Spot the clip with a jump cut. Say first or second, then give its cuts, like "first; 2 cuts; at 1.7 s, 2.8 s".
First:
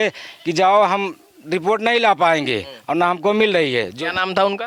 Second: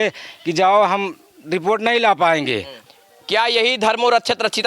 second; 1 cut; at 2.7 s